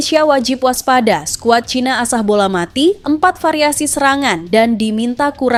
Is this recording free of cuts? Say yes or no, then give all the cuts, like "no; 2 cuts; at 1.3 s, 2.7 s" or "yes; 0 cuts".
yes; 0 cuts